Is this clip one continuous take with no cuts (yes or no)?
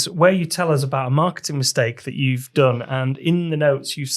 yes